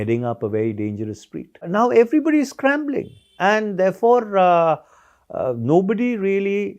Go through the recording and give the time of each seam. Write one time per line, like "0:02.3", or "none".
0:01.7